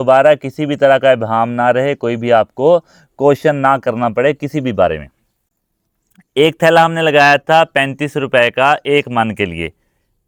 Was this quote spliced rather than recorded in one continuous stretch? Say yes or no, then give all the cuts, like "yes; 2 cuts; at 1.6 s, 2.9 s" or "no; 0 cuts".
no; 0 cuts